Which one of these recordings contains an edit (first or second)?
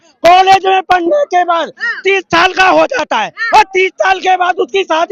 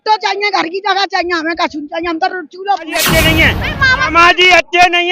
second